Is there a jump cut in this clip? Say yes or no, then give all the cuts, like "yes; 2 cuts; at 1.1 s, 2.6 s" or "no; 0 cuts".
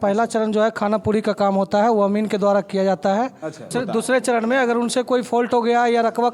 yes; 1 cut; at 3.7 s